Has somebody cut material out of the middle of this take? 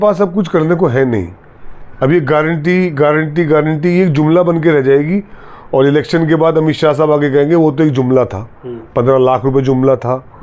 no; 0 cuts

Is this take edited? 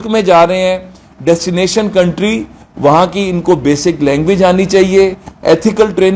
no; 0 cuts

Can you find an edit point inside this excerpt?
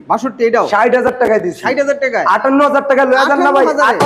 no; 0 cuts

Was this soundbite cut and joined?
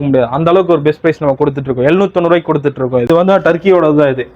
yes; 1 cut; at 3.1 s

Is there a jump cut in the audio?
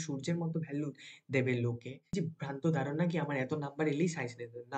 yes; 1 cut; at 2.1 s

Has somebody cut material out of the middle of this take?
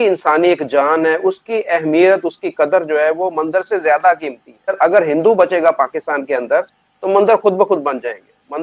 yes; 1 cut; at 4.7 s

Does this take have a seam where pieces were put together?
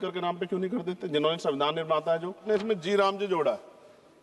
yes; 1 cut; at 2.4 s

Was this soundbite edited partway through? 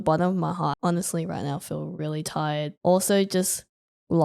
yes; 2 cuts; at 0.8 s, 2.7 s

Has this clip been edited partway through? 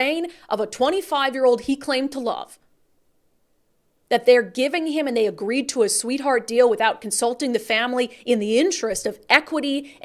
no; 0 cuts

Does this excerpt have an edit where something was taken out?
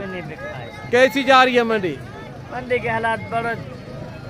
no; 0 cuts

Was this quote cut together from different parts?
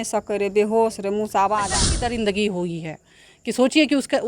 yes; 1 cut; at 2.0 s

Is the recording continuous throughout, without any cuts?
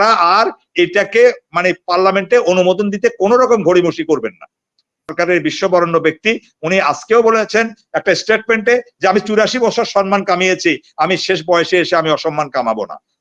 no; 1 cut; at 5.1 s

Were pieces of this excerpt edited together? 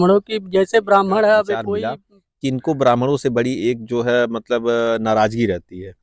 yes; 1 cut; at 1.7 s

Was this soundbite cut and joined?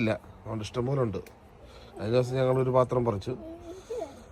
no; 0 cuts

